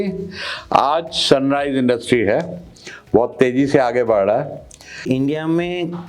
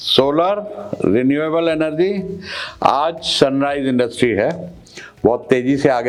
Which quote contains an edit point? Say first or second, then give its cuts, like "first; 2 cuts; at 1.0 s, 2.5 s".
first; 1 cut; at 5.0 s